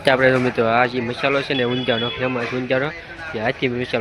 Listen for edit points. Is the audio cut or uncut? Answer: uncut